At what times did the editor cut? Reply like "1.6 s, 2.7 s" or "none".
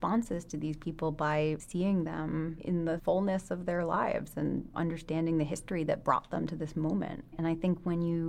1.6 s, 2.9 s, 4.7 s, 7.3 s